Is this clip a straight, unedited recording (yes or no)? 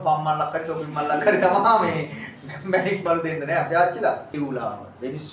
no